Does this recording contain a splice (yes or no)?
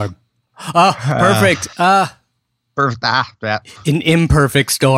yes